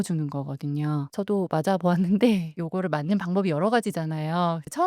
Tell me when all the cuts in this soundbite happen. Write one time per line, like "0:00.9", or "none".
0:01.1